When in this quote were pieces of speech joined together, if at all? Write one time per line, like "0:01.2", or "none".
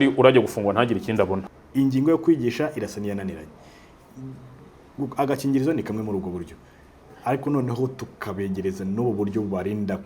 0:01.4